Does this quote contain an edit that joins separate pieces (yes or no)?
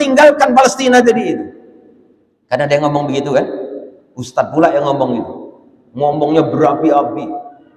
no